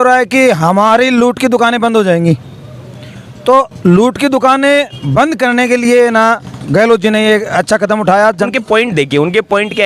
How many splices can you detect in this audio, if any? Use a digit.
1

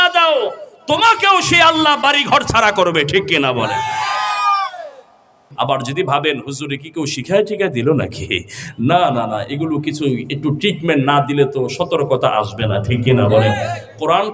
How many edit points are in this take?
1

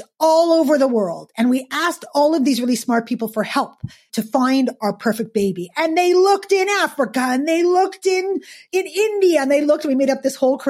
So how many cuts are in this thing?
2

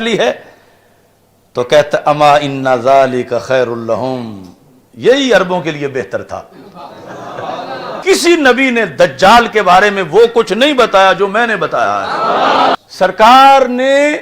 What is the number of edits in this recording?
2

